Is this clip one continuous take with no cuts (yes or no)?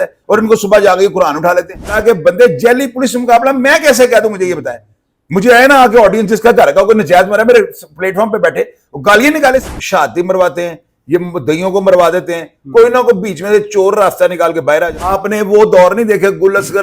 no